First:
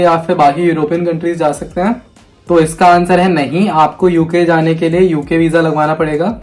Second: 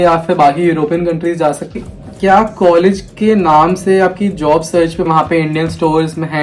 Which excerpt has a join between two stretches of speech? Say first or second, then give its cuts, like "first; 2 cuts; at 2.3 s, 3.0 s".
second; 2 cuts; at 1.8 s, 5.1 s